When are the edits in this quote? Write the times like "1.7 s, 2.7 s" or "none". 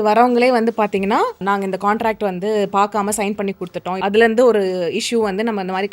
1.4 s, 4.0 s